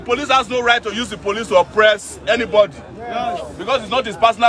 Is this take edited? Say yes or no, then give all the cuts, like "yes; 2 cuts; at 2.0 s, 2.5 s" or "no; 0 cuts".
no; 0 cuts